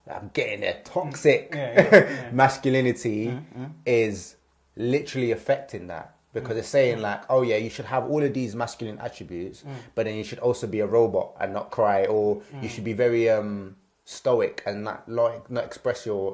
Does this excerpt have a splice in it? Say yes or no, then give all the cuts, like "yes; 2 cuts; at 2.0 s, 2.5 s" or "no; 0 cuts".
no; 0 cuts